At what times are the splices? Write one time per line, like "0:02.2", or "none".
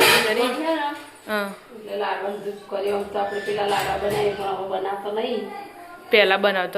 none